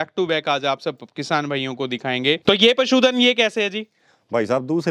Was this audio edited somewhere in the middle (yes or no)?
yes